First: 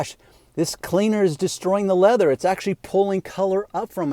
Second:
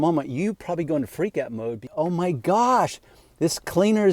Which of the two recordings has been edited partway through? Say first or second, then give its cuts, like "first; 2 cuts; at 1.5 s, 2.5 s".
second; 1 cut; at 1.9 s